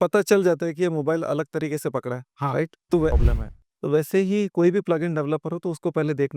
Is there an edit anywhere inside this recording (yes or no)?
yes